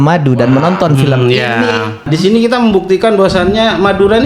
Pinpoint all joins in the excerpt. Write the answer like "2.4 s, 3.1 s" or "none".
2.1 s